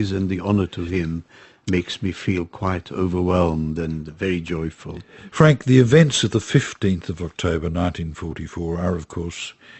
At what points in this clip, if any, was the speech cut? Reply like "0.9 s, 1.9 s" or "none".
none